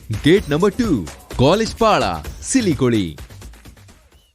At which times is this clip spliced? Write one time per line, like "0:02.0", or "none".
none